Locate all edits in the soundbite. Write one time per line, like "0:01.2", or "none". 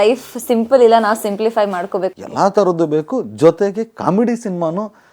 0:02.2

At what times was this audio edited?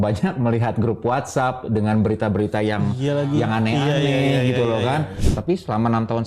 0:05.2

